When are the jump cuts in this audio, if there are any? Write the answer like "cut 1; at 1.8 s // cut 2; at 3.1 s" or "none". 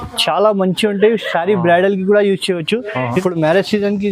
cut 1; at 3.2 s